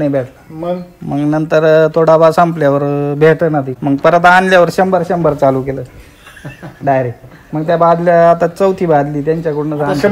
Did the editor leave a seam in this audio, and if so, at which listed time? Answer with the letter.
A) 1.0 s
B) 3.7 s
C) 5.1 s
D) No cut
B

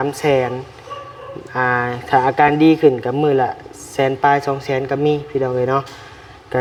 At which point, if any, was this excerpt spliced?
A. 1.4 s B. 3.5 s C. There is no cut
C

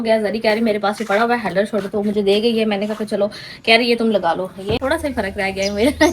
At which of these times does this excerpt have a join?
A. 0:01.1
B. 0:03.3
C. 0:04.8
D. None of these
C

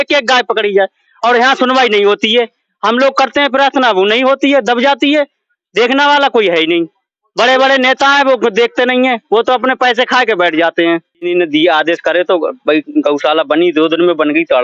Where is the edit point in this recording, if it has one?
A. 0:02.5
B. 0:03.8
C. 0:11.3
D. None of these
C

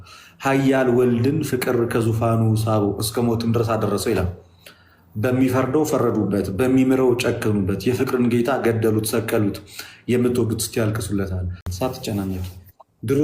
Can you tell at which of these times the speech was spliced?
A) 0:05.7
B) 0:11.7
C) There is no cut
B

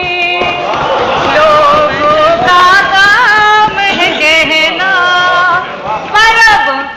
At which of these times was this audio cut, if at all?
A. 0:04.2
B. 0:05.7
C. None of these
C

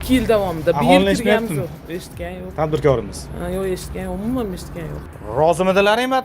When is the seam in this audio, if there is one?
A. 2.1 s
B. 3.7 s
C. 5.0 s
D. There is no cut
C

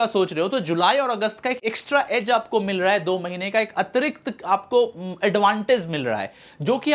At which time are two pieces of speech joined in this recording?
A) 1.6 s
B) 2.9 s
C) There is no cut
C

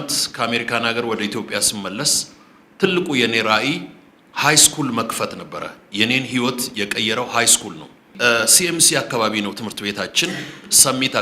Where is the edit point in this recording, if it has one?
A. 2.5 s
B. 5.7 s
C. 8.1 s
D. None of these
C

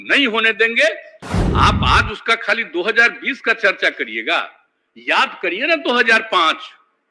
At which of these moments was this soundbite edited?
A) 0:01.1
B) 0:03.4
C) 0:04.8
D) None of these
A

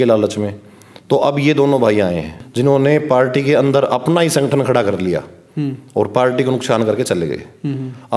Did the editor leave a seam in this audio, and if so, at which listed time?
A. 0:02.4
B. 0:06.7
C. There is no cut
A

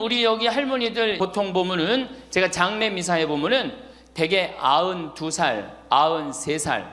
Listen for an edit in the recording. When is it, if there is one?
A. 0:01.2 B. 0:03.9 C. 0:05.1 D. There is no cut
A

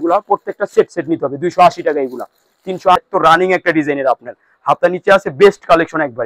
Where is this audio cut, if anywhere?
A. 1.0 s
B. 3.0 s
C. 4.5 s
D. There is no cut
B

